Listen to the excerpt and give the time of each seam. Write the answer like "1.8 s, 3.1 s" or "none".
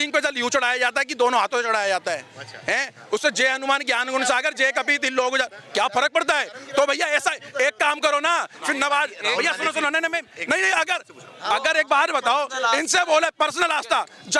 none